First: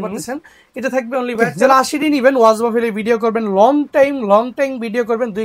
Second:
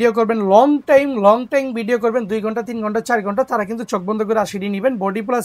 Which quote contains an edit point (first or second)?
first